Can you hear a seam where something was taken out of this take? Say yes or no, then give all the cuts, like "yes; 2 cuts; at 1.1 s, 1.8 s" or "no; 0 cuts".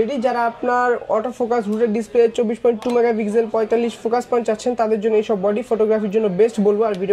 no; 0 cuts